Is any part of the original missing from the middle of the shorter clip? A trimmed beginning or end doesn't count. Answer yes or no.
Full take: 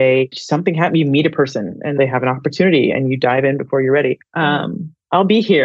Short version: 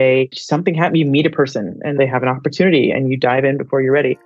no